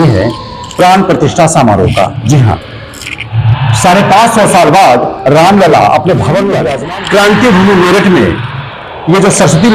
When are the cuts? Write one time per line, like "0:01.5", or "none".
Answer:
0:06.7